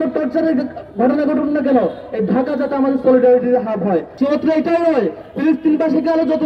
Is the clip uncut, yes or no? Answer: no